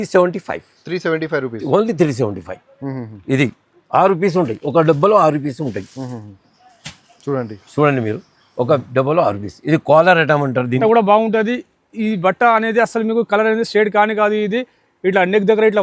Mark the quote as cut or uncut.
cut